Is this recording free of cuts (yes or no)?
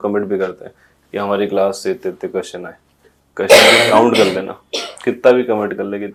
yes